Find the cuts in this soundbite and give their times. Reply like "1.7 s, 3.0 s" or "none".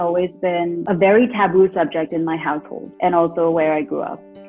none